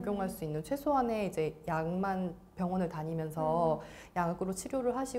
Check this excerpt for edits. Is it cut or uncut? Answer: uncut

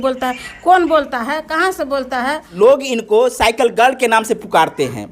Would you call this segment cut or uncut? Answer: cut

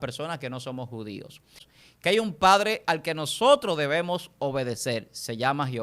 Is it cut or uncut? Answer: cut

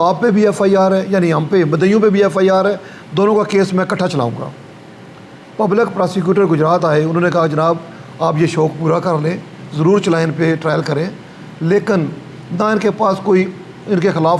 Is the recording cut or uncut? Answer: uncut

